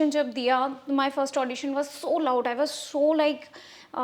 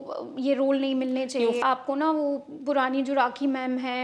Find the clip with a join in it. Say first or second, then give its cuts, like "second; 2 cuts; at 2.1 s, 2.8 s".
second; 1 cut; at 1.6 s